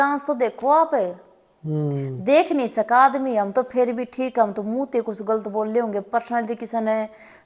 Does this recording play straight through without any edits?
yes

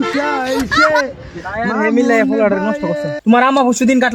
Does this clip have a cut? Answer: yes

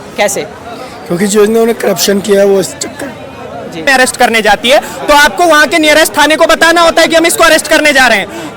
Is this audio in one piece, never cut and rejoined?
no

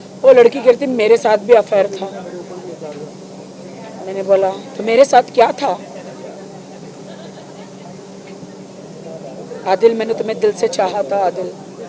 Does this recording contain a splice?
no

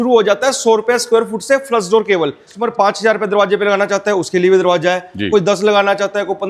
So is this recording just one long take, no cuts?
no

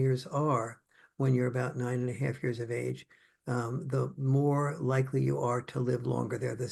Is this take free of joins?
yes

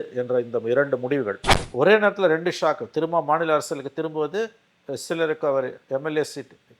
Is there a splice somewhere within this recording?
yes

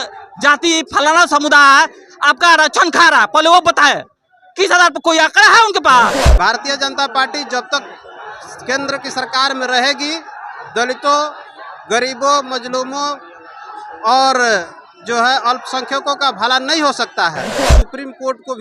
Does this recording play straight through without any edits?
no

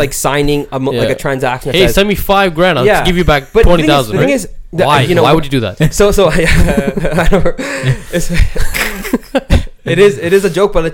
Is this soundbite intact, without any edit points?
yes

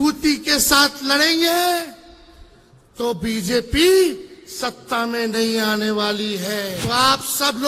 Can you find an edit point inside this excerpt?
yes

